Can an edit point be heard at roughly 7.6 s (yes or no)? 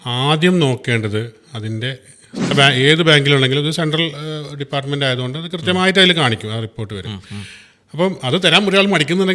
no